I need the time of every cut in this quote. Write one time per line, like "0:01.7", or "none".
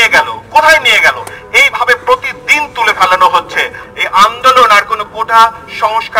0:03.8